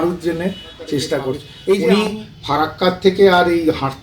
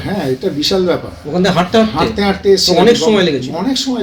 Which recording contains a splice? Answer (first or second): first